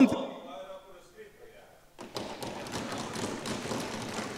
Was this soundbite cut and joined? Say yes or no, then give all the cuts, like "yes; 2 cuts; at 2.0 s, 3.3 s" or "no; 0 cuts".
no; 0 cuts